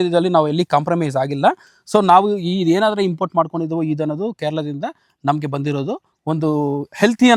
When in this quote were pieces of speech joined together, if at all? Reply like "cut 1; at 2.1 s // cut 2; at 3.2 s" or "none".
none